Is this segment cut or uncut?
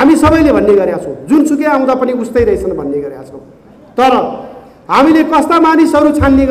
uncut